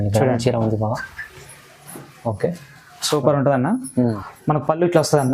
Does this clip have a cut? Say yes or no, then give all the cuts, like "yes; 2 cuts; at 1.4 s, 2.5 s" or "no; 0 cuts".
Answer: yes; 1 cut; at 4.3 s